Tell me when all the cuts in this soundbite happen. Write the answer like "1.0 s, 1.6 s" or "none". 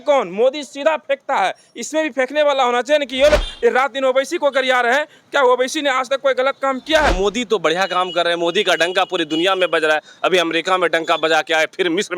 3.5 s, 7.1 s